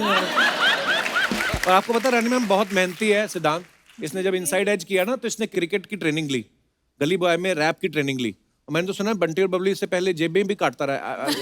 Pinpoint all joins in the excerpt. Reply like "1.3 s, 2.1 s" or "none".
1.4 s